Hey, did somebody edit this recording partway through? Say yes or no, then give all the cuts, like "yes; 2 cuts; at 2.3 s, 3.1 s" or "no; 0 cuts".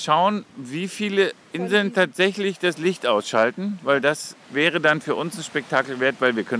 yes; 2 cuts; at 1.4 s, 4.4 s